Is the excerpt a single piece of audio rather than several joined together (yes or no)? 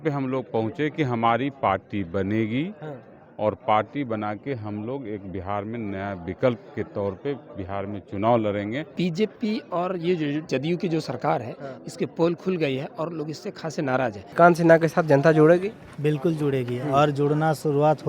no